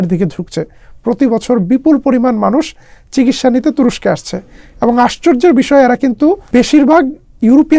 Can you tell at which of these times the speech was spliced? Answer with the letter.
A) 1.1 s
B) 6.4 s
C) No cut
B